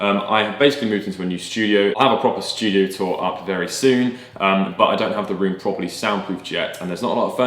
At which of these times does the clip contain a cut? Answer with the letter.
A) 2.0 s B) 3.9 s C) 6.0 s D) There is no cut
A